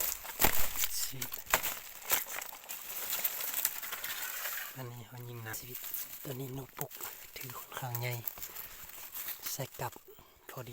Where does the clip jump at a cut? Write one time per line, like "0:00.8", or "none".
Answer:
0:05.5